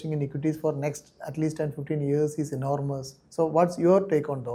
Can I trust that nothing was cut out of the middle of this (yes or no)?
yes